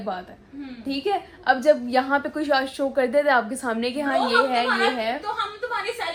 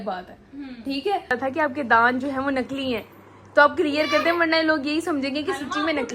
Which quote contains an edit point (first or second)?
second